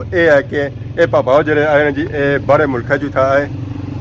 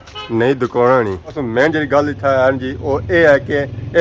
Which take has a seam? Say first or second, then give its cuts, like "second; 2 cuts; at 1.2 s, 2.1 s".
second; 1 cut; at 1.4 s